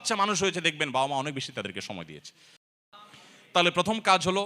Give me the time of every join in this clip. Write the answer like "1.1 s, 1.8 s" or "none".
2.6 s